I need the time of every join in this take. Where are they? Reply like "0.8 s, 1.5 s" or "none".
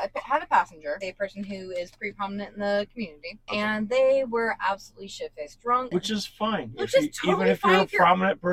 1.1 s, 5.9 s